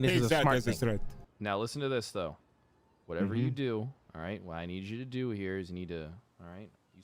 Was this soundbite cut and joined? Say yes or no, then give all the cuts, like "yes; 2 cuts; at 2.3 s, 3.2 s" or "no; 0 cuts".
yes; 1 cut; at 1.3 s